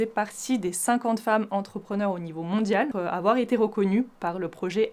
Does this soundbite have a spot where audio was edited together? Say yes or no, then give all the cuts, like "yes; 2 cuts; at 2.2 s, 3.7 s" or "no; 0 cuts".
no; 0 cuts